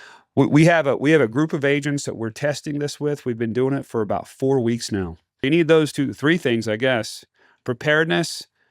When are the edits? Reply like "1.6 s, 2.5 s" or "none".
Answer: 5.4 s